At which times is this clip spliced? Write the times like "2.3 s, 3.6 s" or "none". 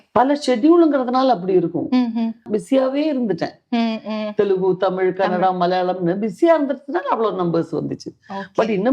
2.5 s